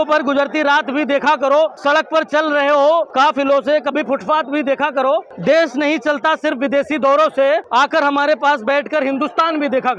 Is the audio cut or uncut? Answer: cut